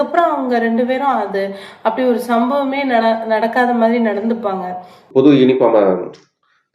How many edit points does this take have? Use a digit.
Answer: 1